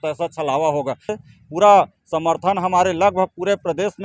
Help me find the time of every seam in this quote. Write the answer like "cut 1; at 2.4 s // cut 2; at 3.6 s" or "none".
cut 1; at 1.1 s